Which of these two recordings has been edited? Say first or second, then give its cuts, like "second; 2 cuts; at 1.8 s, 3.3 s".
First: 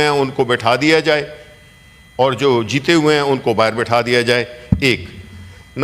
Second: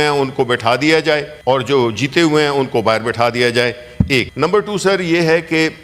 second; 2 cuts; at 1.3 s, 4.3 s